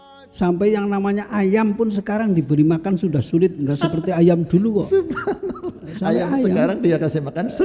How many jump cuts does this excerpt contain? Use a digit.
0